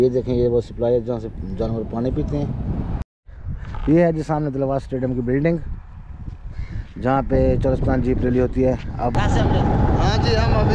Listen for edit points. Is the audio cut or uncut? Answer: cut